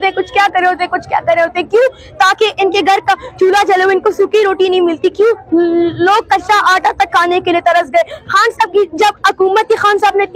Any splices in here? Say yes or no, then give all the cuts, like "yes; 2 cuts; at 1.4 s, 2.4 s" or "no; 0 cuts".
no; 0 cuts